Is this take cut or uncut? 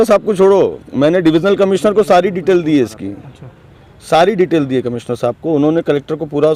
uncut